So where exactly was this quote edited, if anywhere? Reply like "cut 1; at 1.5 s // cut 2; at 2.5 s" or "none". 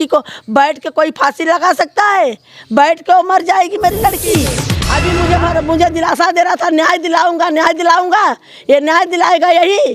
cut 1; at 4.7 s

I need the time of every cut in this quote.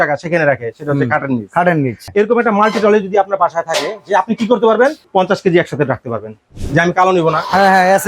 cut 1; at 2.0 s // cut 2; at 5.0 s // cut 3; at 6.5 s

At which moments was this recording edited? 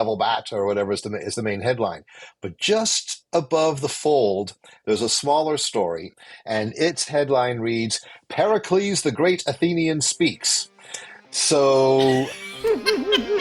cut 1; at 12.4 s

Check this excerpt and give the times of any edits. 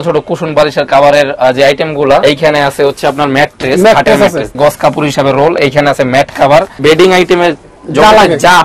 cut 1; at 2.2 s // cut 2; at 4.5 s // cut 3; at 6.8 s

